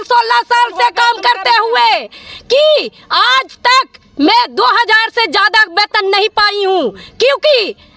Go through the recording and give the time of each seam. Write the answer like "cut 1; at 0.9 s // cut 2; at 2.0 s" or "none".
none